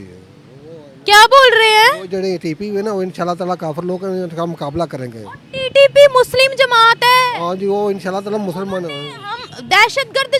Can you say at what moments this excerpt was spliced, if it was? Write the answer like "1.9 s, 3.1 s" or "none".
none